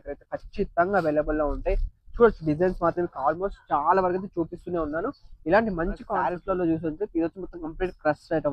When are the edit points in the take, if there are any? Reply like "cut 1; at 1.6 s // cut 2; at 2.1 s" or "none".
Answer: cut 1; at 6.1 s